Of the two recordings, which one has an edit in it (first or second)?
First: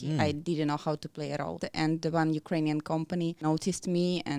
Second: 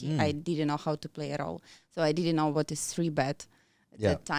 first